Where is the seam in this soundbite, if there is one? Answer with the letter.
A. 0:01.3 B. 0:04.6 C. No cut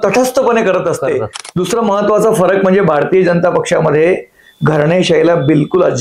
A